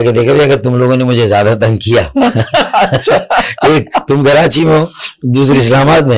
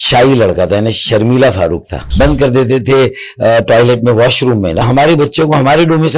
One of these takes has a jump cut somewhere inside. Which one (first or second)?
second